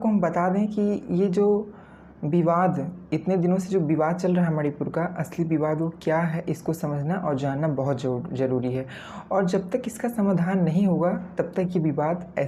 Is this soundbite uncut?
yes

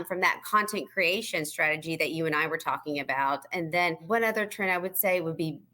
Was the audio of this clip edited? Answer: yes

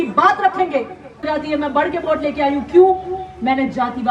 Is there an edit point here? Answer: yes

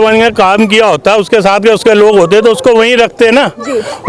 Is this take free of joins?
yes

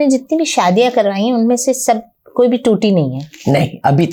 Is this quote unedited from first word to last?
yes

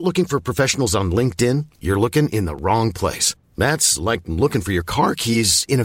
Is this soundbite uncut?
yes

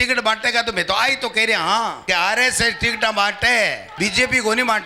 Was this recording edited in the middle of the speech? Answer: yes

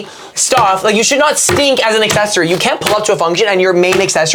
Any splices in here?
no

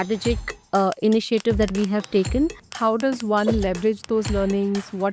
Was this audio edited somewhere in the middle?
yes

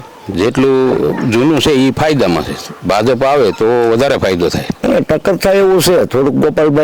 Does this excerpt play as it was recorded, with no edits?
no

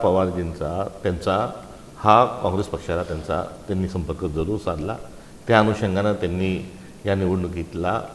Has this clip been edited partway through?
no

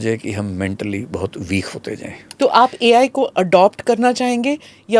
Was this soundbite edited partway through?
yes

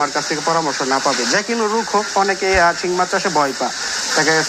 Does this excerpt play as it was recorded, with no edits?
yes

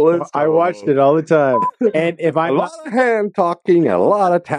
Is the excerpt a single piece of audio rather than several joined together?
no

